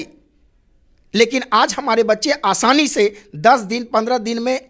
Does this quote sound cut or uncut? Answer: uncut